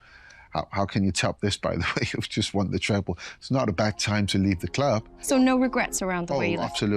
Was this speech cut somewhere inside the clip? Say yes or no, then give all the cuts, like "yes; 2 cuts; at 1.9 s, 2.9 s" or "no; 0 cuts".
yes; 1 cut; at 5.2 s